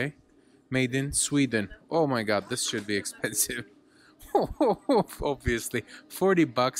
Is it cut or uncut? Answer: uncut